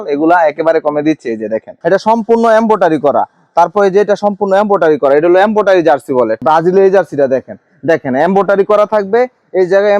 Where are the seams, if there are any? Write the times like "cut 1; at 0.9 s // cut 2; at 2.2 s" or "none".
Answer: cut 1; at 1.7 s // cut 2; at 6.4 s